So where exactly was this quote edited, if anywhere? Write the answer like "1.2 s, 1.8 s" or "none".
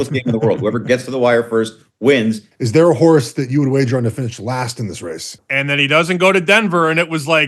2.5 s, 5.4 s